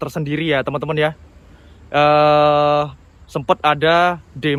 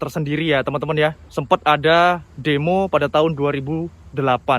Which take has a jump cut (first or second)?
second